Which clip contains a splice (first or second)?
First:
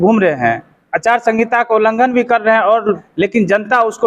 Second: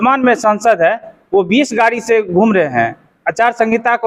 first